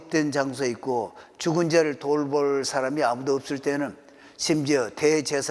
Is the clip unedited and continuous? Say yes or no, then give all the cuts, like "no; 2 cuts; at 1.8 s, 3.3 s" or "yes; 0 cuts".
yes; 0 cuts